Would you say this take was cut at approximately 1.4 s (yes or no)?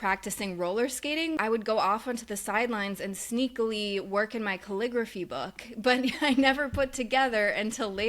yes